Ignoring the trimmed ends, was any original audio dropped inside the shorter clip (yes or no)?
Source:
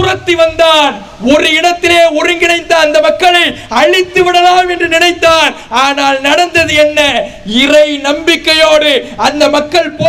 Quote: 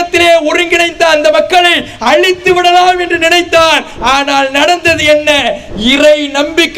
no